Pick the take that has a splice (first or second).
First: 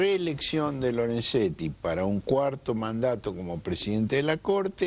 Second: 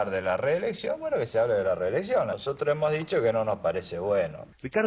second